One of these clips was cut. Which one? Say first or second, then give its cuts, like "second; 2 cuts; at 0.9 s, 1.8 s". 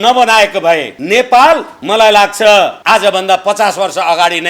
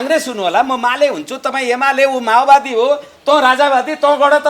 first; 3 cuts; at 0.9 s, 1.7 s, 2.8 s